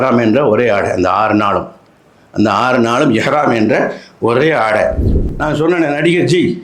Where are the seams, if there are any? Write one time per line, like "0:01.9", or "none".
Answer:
0:05.1